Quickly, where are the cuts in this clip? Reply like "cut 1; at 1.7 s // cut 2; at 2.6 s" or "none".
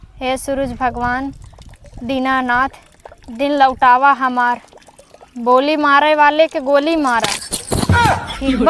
none